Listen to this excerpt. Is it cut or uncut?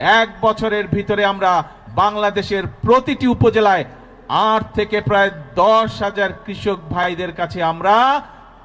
uncut